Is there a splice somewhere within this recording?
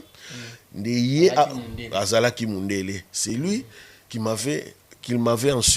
no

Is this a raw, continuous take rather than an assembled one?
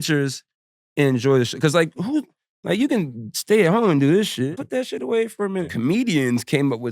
no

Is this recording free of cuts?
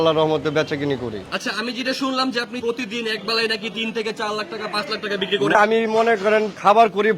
no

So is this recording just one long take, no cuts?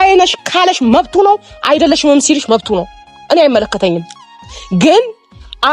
yes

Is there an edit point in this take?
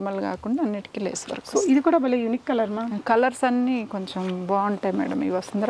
no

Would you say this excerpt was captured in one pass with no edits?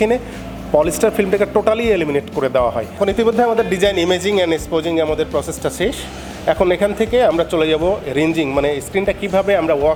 yes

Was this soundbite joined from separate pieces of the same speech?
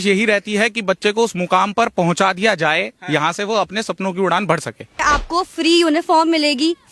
yes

